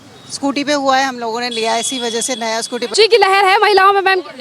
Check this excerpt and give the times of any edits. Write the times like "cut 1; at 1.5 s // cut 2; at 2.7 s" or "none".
cut 1; at 2.9 s